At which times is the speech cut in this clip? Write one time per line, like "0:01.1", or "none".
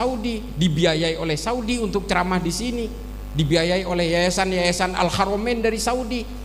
none